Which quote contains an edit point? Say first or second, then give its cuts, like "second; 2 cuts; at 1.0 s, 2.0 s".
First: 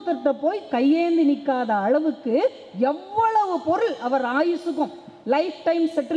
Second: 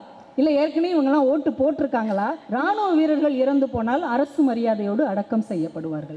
second; 1 cut; at 2.4 s